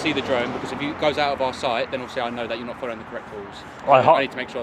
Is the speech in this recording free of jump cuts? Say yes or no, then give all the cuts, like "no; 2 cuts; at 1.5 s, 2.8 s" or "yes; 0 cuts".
no; 1 cut; at 3.7 s